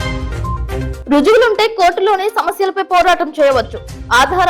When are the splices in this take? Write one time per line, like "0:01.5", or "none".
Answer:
0:00.9

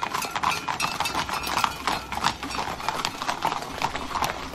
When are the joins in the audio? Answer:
none

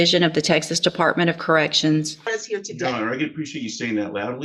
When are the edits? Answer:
0:02.3

